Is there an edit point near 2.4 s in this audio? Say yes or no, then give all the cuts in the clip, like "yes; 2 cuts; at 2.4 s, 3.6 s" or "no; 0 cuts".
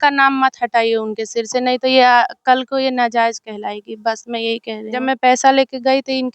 no; 1 cut; at 5.0 s